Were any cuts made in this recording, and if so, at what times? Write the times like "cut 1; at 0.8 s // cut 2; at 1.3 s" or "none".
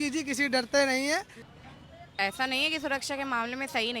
cut 1; at 1.4 s